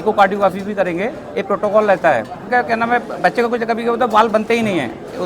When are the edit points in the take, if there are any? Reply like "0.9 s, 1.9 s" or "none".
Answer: 2.4 s

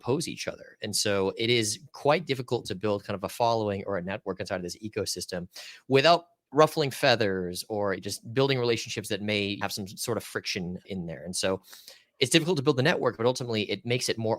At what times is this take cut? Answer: 6.4 s, 8.0 s, 9.6 s, 10.9 s

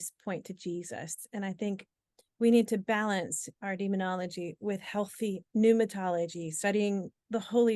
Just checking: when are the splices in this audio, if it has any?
none

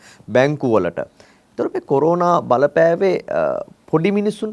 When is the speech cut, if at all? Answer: none

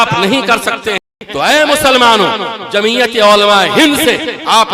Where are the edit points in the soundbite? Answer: 1.2 s

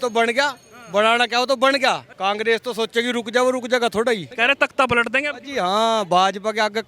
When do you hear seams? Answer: 2.1 s, 4.3 s

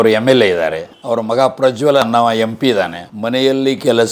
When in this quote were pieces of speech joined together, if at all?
3.0 s

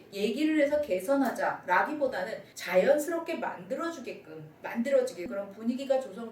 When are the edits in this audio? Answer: 5.3 s

